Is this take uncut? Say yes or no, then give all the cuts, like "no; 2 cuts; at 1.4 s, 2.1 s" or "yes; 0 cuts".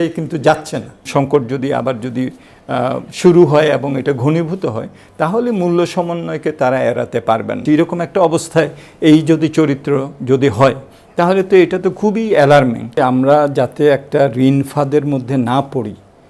no; 3 cuts; at 1.1 s, 7.6 s, 12.9 s